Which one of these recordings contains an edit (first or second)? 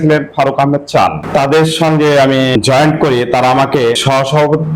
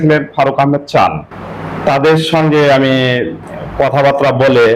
first